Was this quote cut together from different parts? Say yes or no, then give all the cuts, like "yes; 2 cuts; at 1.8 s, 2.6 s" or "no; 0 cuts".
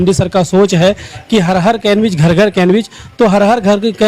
no; 0 cuts